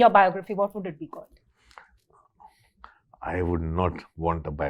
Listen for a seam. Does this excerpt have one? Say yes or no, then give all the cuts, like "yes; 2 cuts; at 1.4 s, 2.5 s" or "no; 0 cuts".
no; 0 cuts